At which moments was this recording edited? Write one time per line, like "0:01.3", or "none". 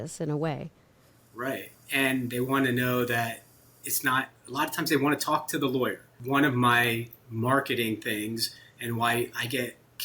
0:06.1